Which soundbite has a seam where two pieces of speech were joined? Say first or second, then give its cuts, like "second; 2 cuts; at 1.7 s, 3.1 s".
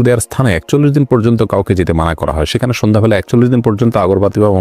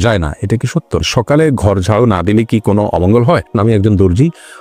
second; 2 cuts; at 1.1 s, 3.5 s